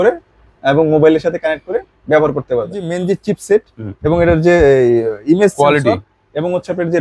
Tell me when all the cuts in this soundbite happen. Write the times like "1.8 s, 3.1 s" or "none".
2.9 s

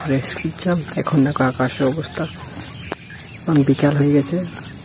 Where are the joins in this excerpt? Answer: none

